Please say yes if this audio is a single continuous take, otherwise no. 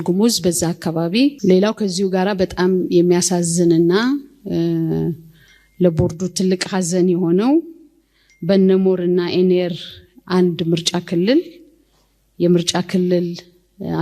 no